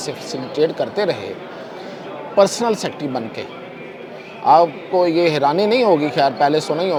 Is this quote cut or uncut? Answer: uncut